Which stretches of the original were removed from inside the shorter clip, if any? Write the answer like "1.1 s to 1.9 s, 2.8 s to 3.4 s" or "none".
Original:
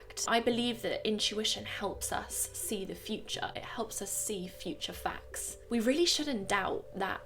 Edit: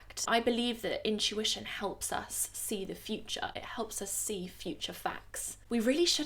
none